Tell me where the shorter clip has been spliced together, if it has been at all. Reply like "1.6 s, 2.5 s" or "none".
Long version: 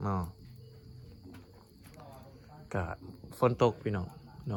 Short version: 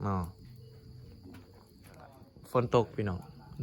2.3 s